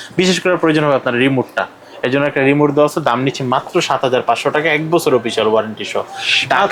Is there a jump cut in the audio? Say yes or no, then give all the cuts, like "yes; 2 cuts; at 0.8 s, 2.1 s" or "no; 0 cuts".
no; 0 cuts